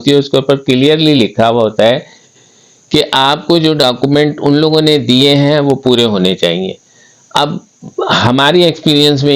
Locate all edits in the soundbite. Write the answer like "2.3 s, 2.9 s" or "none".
none